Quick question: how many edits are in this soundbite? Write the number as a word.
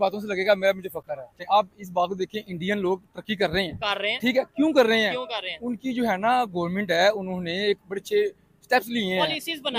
one